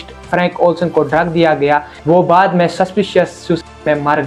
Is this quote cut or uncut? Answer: uncut